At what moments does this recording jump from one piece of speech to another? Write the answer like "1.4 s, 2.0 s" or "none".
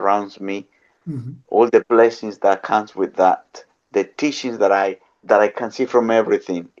none